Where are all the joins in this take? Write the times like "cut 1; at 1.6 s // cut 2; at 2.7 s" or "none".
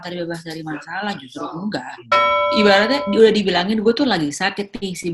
cut 1; at 2.3 s